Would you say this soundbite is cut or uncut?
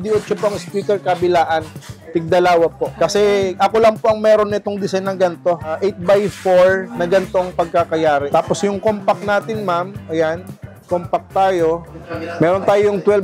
cut